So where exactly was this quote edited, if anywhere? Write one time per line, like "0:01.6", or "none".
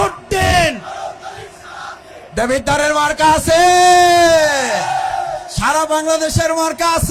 0:02.1

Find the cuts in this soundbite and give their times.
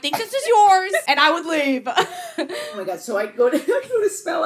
0:01.0
0:02.6

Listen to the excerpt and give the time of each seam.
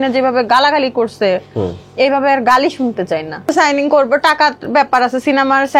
0:03.5

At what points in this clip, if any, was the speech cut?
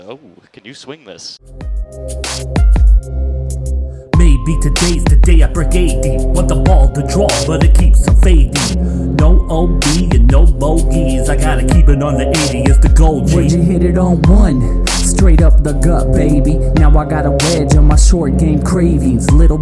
0:01.4

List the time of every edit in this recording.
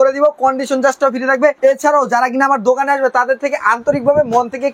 0:01.6

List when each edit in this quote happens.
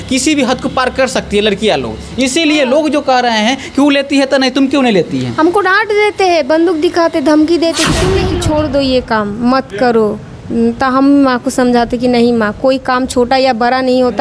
0:08.2

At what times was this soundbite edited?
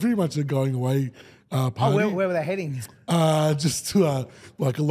none

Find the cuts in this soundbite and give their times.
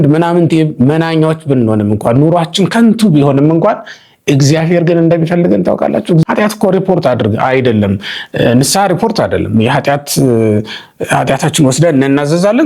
0:06.2

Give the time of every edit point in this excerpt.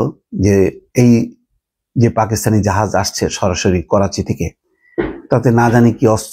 none

